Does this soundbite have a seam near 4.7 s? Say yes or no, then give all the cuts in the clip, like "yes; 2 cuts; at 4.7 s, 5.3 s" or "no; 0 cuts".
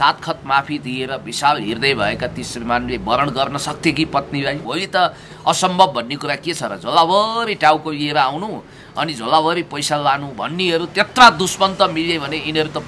yes; 1 cut; at 4.7 s